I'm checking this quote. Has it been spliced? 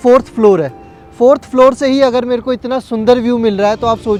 no; 0 cuts

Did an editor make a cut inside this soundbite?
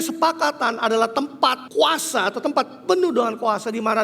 yes; 1 cut; at 1.6 s

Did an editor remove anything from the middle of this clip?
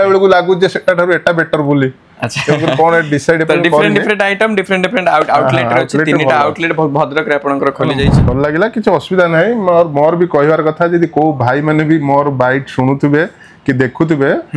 yes; 1 cut; at 8.2 s

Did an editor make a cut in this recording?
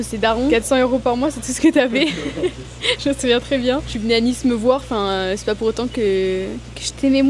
no; 0 cuts

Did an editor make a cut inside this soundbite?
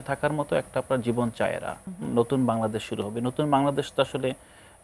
yes; 1 cut; at 1.9 s

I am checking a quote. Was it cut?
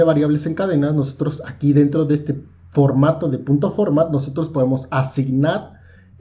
no; 0 cuts

